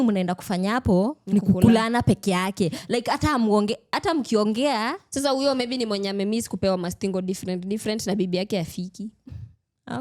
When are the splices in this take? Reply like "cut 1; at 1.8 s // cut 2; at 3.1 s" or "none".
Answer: none

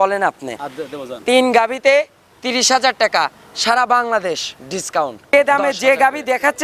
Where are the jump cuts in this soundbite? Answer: cut 1; at 5.3 s

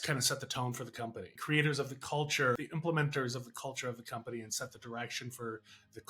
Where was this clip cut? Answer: cut 1; at 1.4 s // cut 2; at 2.6 s

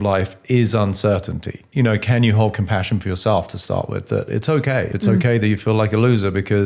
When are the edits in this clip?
cut 1; at 1.6 s // cut 2; at 4.9 s

